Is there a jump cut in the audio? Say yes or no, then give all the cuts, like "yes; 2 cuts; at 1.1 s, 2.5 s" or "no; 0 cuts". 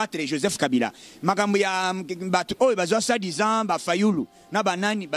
no; 0 cuts